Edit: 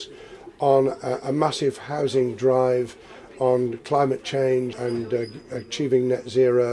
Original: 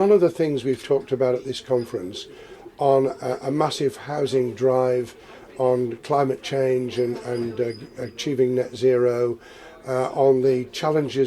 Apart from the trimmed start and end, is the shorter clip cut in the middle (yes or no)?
yes